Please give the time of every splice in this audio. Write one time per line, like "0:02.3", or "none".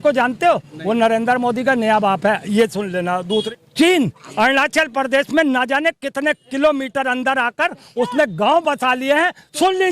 0:03.5